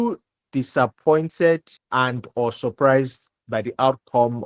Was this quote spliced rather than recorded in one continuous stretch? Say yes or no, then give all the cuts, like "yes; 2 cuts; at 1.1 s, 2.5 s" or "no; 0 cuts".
yes; 1 cut; at 1.3 s